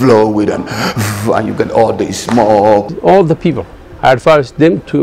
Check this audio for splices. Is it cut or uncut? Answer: cut